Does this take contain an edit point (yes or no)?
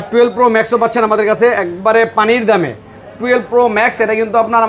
no